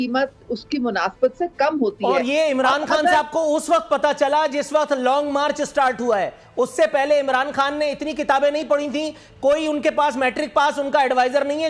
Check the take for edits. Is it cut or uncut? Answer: uncut